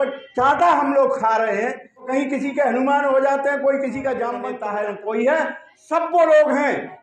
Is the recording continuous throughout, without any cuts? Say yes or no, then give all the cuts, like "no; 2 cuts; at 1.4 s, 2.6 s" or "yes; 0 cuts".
no; 2 cuts; at 2.1 s, 4.5 s